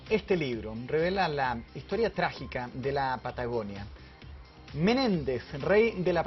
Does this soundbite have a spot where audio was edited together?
no; 0 cuts

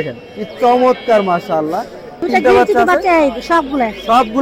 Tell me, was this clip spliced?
yes; 1 cut; at 2.2 s

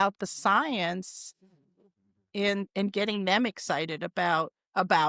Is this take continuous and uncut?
yes; 0 cuts

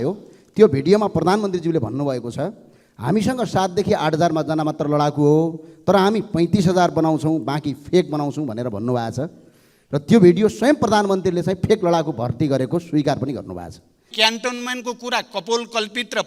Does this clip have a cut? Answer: yes; 1 cut; at 14.1 s

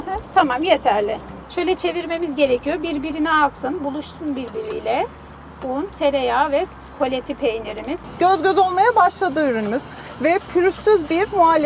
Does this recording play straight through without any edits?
no; 2 cuts; at 1.4 s, 8.0 s

